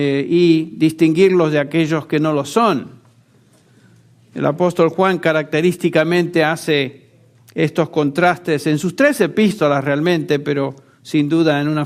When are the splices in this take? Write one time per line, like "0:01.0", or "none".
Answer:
0:05.2